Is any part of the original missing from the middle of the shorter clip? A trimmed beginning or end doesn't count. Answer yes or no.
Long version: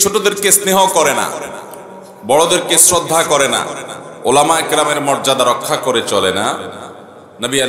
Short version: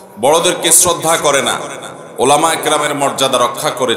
no